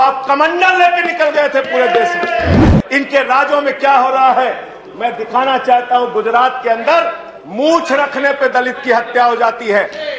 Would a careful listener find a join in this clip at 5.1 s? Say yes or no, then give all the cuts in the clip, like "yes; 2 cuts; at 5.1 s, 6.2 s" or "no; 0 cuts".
no; 1 cut; at 2.7 s